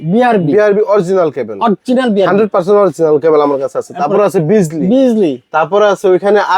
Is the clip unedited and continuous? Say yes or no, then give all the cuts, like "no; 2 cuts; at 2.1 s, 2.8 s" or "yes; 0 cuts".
yes; 0 cuts